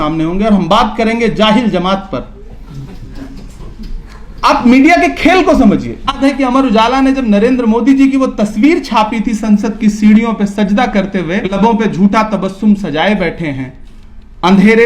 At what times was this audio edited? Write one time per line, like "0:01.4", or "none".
0:06.2
0:11.5